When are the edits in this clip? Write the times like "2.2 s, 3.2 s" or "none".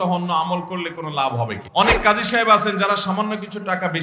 1.6 s